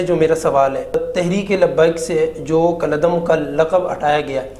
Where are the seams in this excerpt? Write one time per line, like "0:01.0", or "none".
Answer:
0:01.0